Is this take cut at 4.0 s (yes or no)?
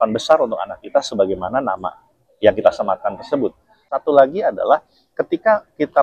yes